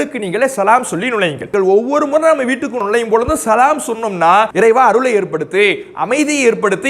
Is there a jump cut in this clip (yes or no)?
yes